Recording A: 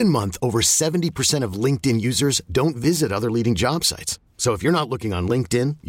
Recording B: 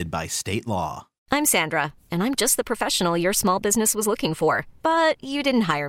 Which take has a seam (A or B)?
B